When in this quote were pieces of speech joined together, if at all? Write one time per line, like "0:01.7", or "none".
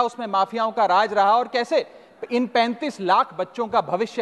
none